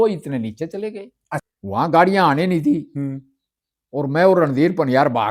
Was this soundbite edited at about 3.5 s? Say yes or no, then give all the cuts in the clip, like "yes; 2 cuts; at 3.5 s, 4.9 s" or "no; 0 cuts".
no; 1 cut; at 1.4 s